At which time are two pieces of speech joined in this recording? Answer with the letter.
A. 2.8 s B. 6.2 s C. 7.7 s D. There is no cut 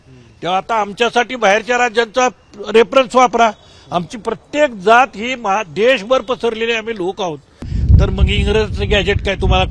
C